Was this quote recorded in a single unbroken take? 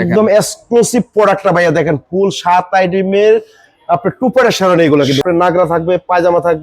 no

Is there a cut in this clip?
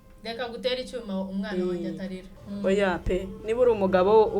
yes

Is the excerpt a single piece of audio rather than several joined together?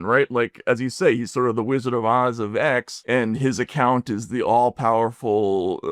yes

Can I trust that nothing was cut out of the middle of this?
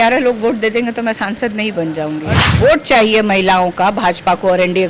no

